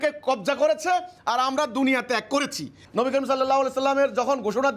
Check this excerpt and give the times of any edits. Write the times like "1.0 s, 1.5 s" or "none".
2.8 s